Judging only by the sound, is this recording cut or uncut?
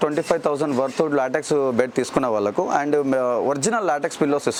uncut